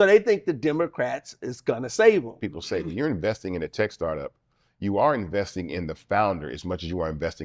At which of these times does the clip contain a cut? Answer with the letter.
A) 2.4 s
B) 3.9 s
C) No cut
A